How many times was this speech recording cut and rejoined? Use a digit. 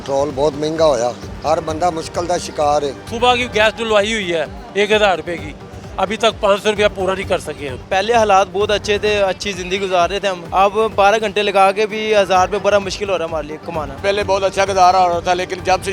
5